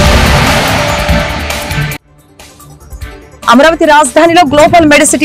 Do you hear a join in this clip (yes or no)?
yes